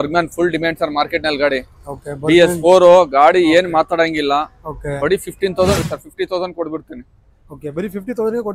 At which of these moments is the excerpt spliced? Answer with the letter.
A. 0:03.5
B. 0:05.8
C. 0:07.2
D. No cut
B